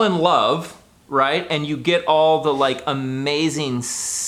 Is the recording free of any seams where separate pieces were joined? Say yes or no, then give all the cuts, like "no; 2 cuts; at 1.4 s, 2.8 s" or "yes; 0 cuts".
yes; 0 cuts